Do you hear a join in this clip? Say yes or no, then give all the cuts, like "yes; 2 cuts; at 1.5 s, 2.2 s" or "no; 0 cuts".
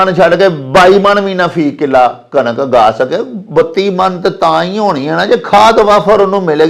no; 0 cuts